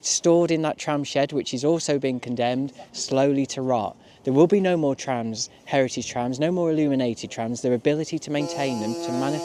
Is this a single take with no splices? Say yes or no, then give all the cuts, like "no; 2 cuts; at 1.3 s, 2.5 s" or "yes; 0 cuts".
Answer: yes; 0 cuts